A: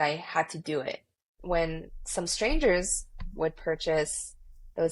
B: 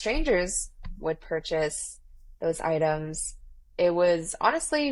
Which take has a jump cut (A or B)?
A